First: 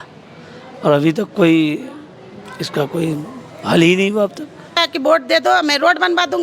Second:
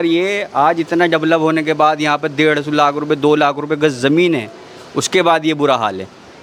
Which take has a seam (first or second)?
first